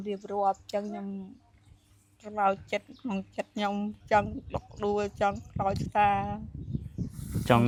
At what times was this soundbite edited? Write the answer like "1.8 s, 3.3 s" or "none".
none